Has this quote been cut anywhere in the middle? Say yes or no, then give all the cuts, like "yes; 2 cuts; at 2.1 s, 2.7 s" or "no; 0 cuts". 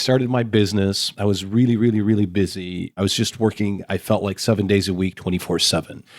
yes; 2 cuts; at 1.1 s, 2.9 s